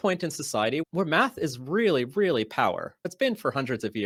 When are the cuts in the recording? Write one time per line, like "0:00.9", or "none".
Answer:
none